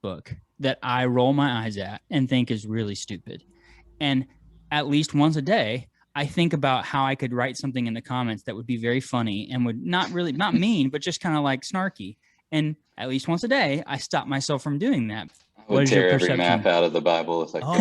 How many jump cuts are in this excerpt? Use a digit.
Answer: 1